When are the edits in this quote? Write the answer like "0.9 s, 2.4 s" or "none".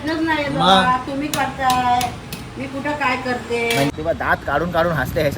3.9 s